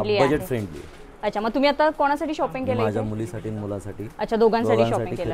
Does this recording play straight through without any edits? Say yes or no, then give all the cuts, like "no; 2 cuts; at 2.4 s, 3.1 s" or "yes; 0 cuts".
yes; 0 cuts